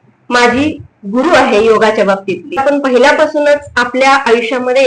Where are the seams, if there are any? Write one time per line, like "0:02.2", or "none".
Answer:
0:02.6